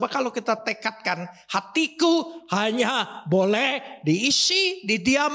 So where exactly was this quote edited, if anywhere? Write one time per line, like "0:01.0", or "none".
none

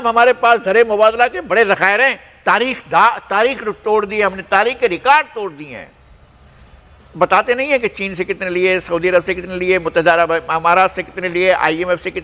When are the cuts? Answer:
none

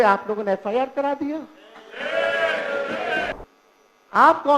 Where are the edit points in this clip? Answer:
0:03.4

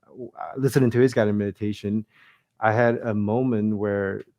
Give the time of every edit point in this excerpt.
0:02.2

